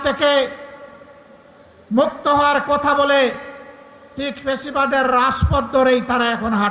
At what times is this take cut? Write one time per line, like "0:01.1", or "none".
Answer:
none